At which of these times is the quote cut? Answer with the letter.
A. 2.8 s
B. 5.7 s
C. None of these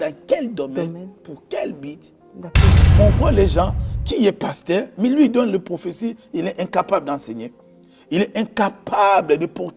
A